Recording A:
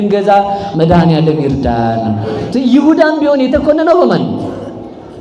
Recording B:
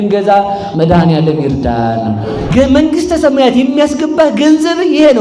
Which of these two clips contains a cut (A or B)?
B